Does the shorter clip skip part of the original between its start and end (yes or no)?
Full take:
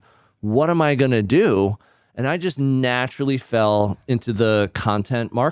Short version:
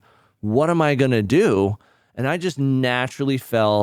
no